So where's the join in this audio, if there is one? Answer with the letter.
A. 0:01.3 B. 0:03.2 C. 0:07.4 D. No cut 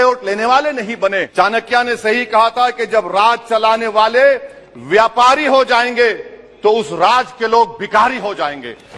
A